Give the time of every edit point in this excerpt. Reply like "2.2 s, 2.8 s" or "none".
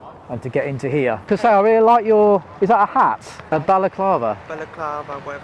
1.2 s, 3.3 s